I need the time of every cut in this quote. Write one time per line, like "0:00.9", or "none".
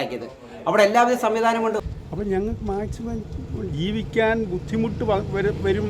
0:01.9